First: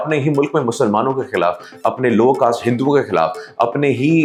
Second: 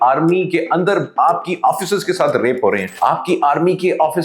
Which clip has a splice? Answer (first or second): second